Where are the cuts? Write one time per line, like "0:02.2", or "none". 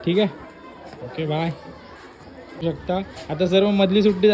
0:02.6